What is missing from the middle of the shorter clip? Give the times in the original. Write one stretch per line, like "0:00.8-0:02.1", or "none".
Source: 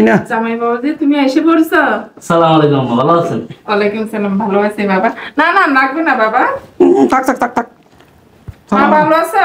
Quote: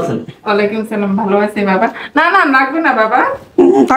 none